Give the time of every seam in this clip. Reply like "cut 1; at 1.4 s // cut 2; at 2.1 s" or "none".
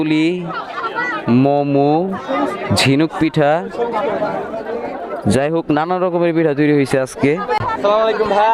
cut 1; at 7.6 s